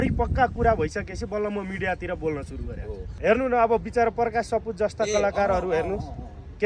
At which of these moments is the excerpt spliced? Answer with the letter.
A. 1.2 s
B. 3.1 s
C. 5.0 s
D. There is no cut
B